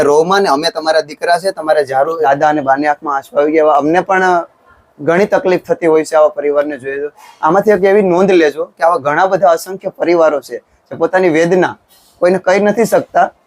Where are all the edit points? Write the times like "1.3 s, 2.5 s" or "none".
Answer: 2.2 s